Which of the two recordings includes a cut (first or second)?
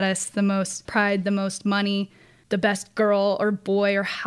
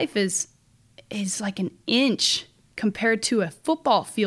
first